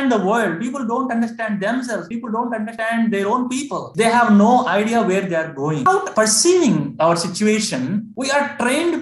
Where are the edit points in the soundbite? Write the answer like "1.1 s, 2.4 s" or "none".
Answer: 5.9 s